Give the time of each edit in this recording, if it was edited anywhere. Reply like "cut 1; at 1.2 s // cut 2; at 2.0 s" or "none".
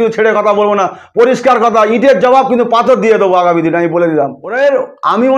cut 1; at 4.4 s